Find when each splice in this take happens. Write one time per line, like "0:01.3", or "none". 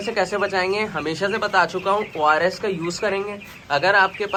none